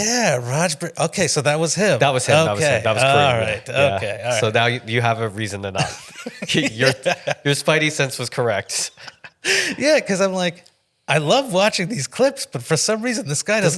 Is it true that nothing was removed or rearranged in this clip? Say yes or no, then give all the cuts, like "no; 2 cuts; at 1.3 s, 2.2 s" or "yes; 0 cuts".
yes; 0 cuts